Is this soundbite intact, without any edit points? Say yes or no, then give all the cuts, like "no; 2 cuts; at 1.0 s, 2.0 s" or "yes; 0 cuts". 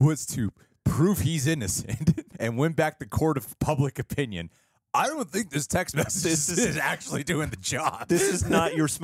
no; 1 cut; at 2.3 s